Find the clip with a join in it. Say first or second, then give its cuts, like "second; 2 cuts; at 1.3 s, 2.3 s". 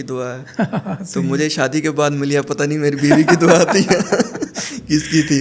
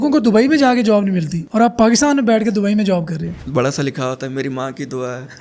second; 2 cuts; at 1.3 s, 3.4 s